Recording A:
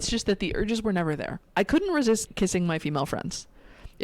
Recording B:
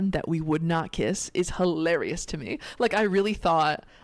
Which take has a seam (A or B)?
A